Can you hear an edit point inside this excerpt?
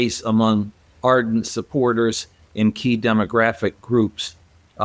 no; 0 cuts

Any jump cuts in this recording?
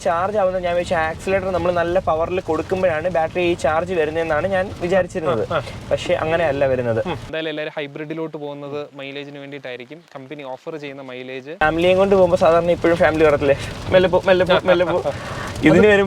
yes; 2 cuts; at 7.2 s, 11.6 s

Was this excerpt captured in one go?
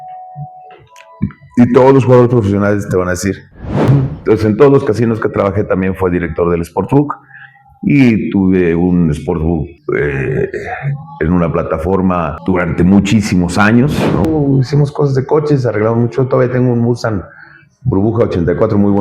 no; 2 cuts; at 3.9 s, 14.3 s

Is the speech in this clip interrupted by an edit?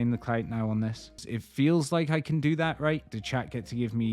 yes; 2 cuts; at 1.3 s, 3.1 s

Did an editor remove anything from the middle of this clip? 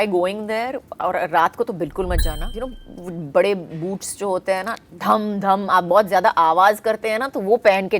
yes; 1 cut; at 2.5 s

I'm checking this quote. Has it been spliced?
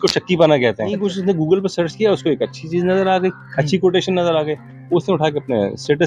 yes; 1 cut; at 1.0 s

